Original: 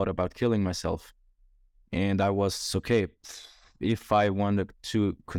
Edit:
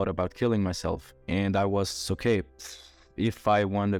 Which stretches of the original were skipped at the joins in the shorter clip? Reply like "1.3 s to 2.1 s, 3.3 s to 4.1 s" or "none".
1.1 s to 1.8 s